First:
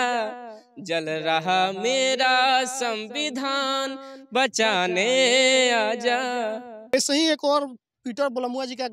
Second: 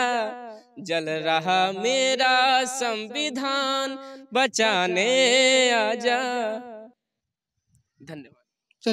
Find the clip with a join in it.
first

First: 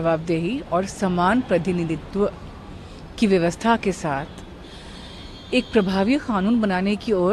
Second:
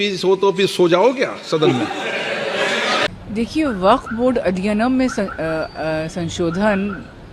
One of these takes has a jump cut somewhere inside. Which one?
second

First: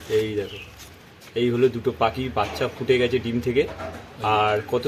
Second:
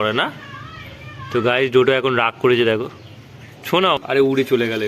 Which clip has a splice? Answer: second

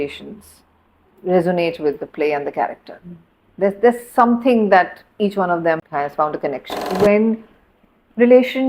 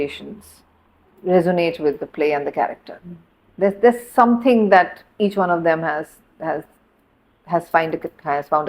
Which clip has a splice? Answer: first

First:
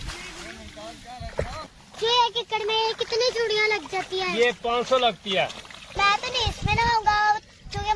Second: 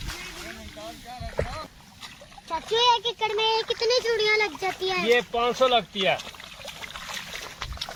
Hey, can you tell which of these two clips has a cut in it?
first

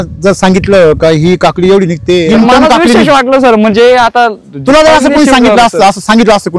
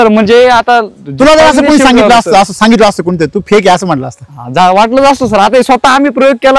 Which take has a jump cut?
first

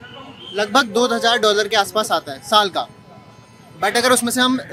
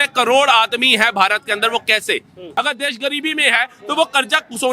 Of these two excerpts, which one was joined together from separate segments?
second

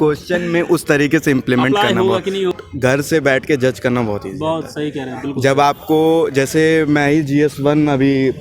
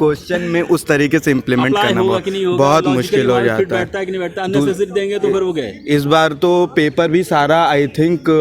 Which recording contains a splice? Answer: first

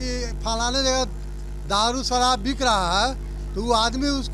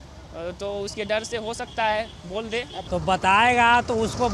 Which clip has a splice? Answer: second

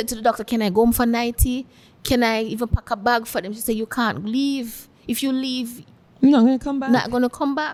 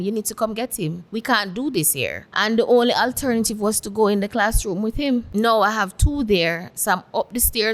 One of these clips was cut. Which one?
second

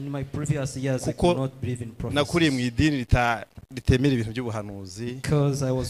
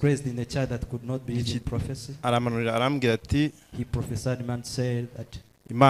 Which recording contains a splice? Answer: second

